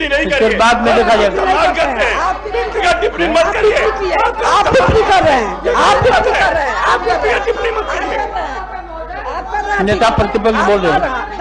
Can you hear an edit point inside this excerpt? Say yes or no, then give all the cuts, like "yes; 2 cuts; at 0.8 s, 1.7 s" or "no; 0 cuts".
no; 0 cuts